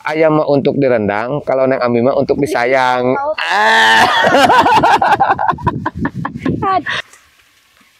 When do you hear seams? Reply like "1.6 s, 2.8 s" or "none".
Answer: 6.9 s